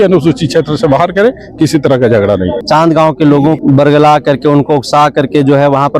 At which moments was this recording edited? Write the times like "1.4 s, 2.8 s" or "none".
2.6 s, 3.6 s